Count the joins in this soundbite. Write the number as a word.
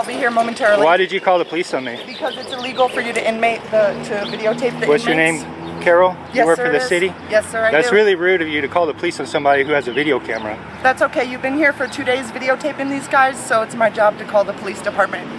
zero